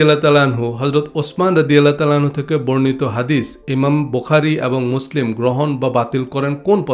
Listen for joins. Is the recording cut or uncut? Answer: uncut